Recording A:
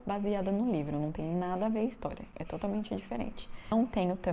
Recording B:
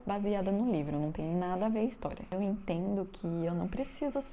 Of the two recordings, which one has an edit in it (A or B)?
B